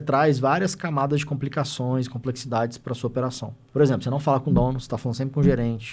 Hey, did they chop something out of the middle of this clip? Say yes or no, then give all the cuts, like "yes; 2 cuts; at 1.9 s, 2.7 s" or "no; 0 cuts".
yes; 1 cut; at 3.5 s